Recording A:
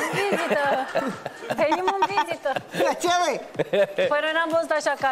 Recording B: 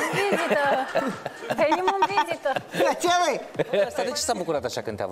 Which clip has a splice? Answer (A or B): B